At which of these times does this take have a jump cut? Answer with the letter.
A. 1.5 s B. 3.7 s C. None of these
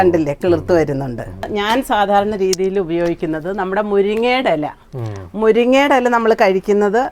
A